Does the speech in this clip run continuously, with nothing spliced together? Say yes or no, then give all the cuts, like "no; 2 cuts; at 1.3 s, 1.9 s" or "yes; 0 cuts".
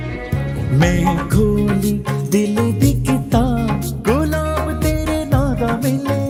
yes; 0 cuts